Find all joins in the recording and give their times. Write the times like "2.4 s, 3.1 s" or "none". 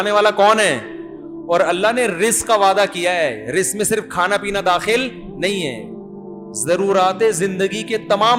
none